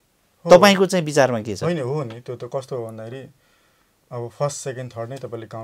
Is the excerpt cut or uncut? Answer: uncut